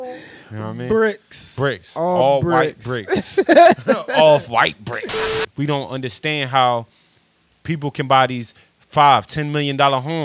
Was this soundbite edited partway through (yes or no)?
yes